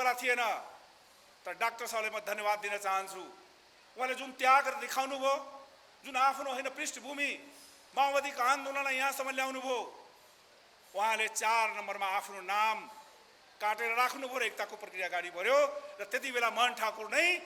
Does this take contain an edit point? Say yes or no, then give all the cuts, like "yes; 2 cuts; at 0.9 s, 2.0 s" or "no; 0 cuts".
no; 0 cuts